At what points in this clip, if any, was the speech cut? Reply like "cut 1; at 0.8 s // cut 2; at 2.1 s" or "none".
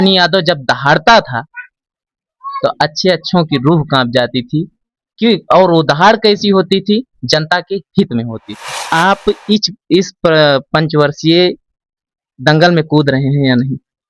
cut 1; at 8.7 s